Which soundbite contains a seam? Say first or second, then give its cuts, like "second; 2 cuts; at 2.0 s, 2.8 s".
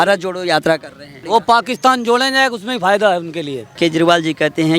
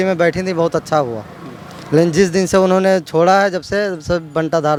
first; 2 cuts; at 1.2 s, 3.7 s